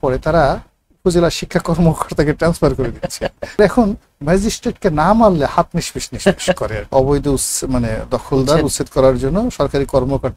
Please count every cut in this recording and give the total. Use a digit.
2